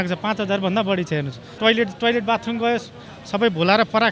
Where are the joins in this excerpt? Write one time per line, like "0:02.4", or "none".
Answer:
0:01.5